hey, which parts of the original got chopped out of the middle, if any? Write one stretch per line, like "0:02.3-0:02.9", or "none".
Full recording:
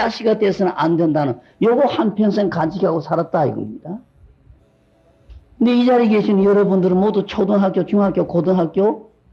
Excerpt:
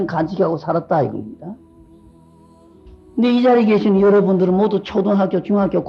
none

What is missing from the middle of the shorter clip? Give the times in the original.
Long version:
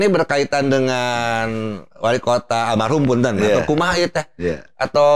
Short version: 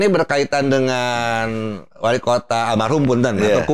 none

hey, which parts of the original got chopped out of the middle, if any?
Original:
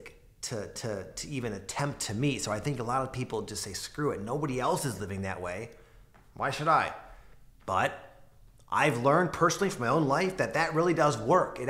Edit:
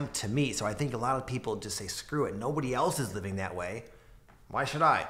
none

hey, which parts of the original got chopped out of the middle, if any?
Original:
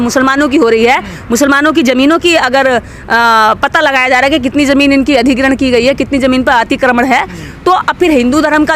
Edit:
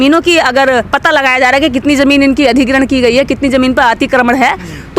0:02.9-0:03.6

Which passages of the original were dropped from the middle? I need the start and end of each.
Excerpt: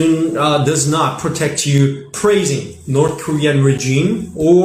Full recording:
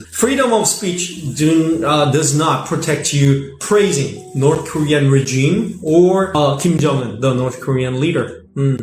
none

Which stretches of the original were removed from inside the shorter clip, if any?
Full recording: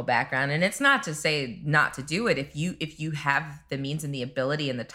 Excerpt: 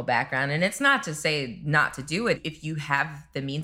0:02.4-0:02.7

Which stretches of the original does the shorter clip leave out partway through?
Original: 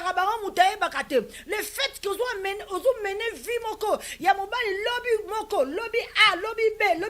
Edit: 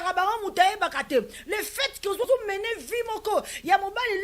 0:02.3-0:02.8

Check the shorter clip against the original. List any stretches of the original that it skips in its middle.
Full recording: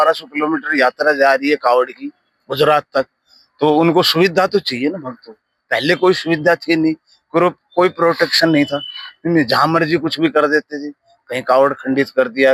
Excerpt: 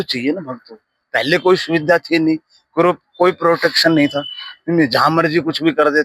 none

